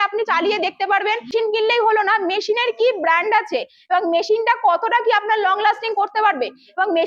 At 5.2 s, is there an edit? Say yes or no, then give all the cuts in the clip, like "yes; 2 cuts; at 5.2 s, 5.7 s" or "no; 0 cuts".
no; 1 cut; at 1.3 s